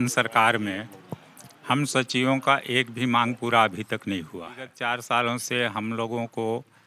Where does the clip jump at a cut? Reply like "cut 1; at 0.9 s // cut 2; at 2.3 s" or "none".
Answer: cut 1; at 4.7 s